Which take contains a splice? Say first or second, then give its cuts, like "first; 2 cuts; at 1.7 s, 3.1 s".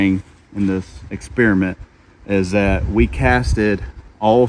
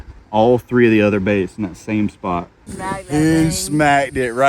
second; 1 cut; at 2.7 s